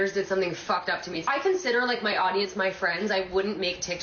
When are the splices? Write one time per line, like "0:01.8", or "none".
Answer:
0:01.2